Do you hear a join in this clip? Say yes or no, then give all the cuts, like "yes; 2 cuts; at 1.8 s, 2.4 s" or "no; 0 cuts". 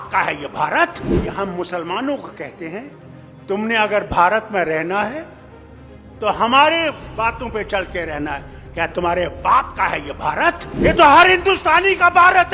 yes; 2 cuts; at 1.3 s, 10.9 s